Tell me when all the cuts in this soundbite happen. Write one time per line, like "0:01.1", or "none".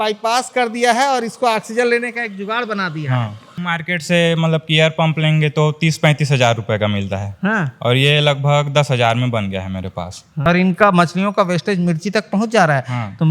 0:03.6
0:10.4